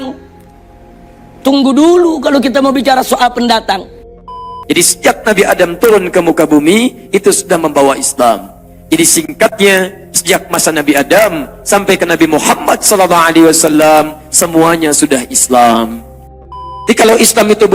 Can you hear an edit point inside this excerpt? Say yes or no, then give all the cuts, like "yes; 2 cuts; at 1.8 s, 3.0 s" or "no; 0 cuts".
yes; 2 cuts; at 4.5 s, 16.4 s